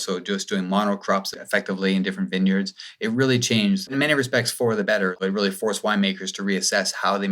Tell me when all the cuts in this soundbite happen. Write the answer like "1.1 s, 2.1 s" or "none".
3.9 s, 5.2 s